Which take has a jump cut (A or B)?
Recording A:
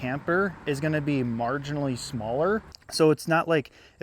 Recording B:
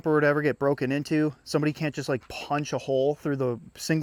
A